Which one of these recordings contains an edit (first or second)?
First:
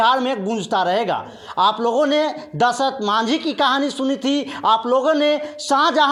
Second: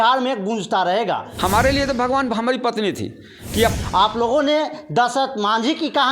second